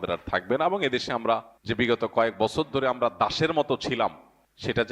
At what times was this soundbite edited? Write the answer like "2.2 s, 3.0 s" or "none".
1.5 s